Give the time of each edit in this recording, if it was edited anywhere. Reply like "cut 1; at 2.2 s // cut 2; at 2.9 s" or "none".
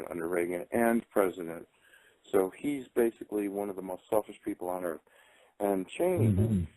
cut 1; at 3.9 s